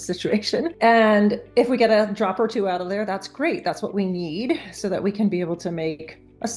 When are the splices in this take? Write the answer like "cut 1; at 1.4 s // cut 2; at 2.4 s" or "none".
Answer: none